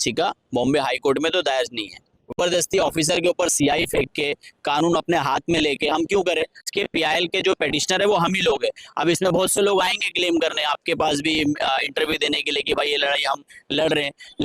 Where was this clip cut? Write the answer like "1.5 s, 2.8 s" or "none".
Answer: 2.4 s, 6.7 s